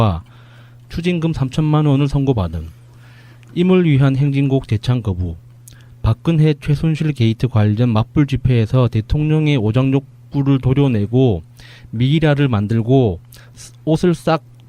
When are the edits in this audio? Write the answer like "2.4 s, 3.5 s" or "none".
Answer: 1.5 s